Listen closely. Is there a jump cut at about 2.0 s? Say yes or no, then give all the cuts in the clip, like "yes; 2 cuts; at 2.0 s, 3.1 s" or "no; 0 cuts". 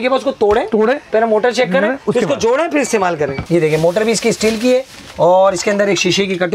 no; 1 cut; at 3.4 s